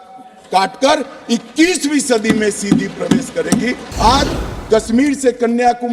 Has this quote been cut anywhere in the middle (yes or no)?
yes